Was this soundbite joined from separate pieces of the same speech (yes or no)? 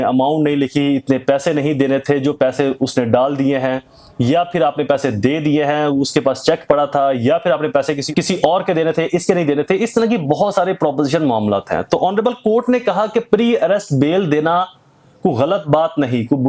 no